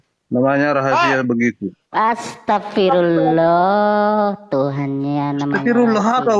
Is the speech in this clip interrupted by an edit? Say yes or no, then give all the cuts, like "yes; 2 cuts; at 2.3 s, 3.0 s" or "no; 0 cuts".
no; 0 cuts